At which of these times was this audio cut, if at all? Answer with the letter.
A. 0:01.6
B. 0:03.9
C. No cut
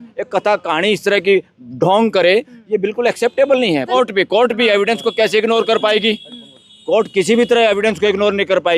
B